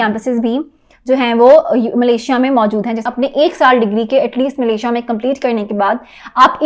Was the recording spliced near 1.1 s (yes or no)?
no